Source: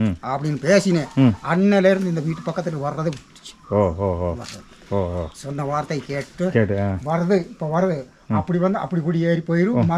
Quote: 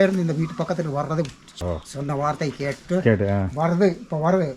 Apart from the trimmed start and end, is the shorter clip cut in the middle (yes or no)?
yes